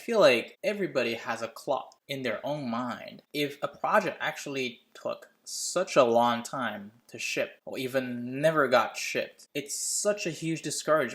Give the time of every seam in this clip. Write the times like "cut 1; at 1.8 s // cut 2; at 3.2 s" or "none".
cut 1; at 9.4 s